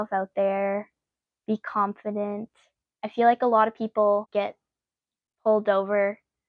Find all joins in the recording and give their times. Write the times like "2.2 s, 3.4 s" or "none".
4.3 s